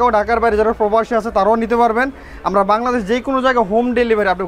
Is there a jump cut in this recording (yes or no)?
no